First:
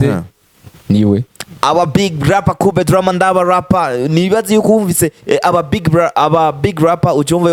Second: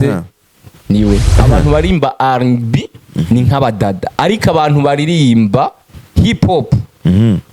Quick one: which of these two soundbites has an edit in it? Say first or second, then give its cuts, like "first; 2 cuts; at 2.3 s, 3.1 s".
second; 1 cut; at 1.3 s